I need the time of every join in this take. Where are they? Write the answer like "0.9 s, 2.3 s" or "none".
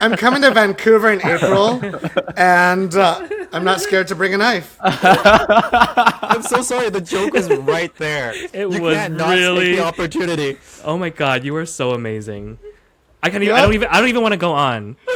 none